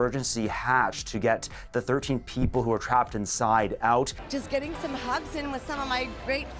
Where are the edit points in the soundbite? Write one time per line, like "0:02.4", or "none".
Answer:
0:04.1